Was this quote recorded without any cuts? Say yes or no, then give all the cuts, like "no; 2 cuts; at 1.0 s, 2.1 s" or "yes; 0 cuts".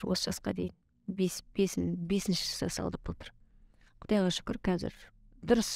yes; 0 cuts